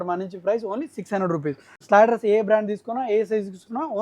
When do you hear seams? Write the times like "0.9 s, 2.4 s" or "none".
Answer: 1.8 s